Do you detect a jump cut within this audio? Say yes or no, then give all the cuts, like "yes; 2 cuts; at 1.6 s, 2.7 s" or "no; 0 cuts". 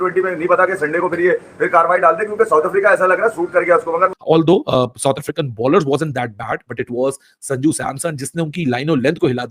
yes; 1 cut; at 4.2 s